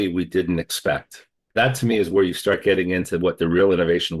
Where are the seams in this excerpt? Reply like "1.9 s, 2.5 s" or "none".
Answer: 1.5 s